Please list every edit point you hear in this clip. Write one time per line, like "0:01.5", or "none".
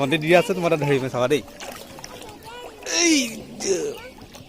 none